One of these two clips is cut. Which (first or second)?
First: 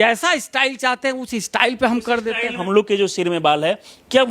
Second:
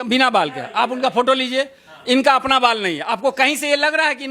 first